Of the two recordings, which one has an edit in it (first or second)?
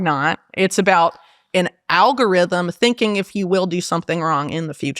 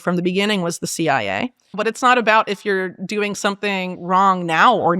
second